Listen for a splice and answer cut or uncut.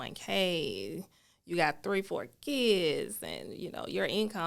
uncut